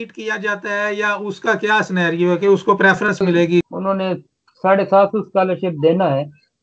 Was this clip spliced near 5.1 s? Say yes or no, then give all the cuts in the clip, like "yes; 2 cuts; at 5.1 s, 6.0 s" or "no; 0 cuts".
no; 1 cut; at 3.6 s